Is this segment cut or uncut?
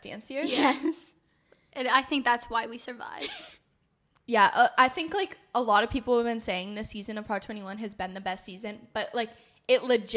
uncut